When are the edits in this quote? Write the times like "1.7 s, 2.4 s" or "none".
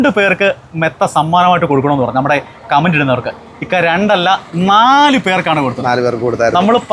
none